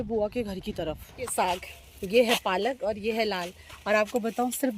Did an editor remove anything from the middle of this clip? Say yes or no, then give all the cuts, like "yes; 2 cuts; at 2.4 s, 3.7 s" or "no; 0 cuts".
yes; 1 cut; at 1.3 s